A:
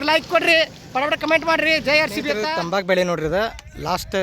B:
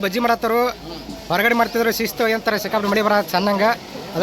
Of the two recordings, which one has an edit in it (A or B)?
A